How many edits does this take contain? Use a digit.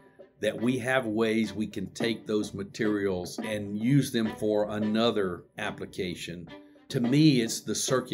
1